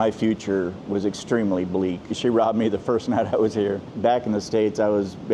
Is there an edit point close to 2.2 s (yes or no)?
yes